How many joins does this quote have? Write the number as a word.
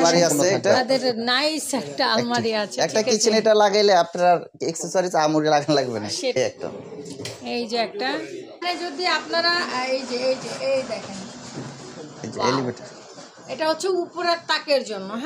two